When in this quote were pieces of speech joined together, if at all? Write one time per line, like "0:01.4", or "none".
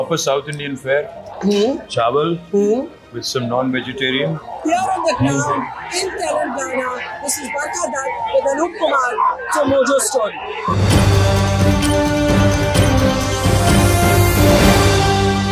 0:04.5
0:10.7